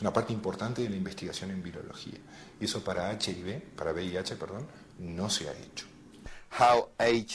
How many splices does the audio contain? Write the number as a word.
one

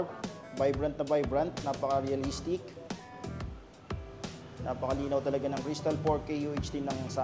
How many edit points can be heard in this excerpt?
zero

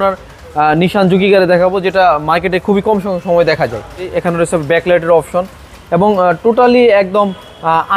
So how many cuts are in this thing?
one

